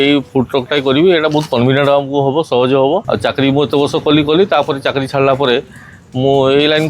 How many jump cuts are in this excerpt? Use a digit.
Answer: 1